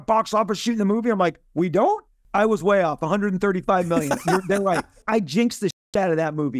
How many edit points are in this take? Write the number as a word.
two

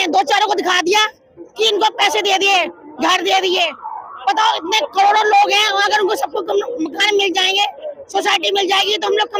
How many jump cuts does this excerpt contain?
zero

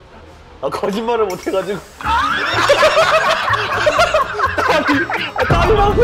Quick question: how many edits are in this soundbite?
zero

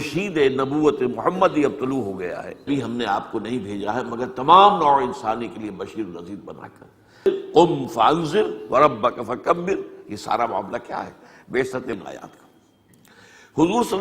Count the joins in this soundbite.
three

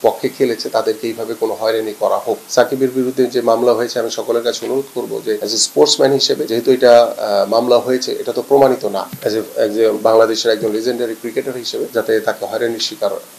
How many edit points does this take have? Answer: five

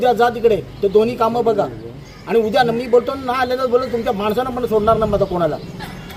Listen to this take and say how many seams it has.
zero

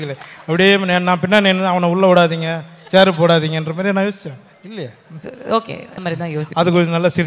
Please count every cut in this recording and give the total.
one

